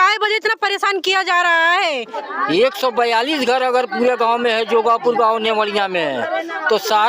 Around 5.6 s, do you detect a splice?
no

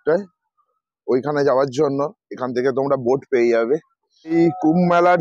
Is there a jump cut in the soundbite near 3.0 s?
no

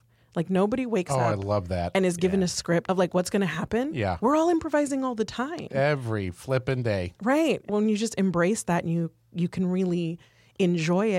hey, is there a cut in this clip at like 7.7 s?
yes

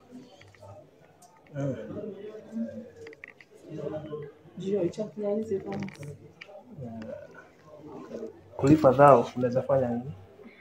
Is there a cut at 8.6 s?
yes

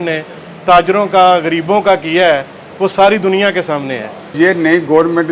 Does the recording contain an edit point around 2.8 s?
no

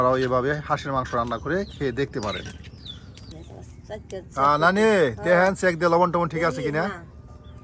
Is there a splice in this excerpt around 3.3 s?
yes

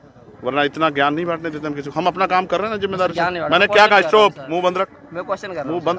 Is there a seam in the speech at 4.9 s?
no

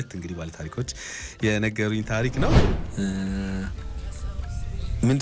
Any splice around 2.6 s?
yes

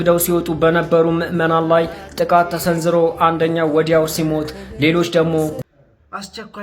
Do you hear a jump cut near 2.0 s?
no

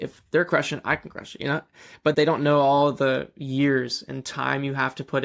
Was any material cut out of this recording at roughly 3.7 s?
no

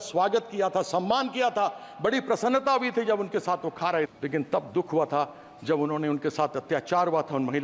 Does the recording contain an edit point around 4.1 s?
yes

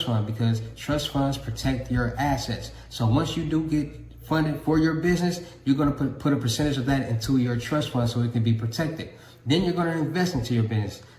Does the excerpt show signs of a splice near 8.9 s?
yes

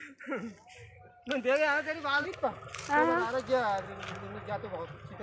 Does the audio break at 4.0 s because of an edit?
no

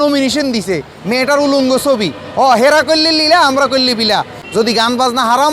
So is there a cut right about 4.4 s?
yes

